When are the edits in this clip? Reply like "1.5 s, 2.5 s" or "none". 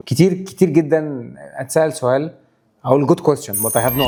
none